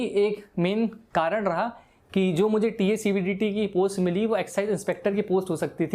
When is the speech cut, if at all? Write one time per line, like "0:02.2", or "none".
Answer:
none